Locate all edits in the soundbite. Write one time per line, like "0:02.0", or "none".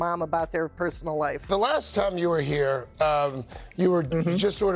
0:01.4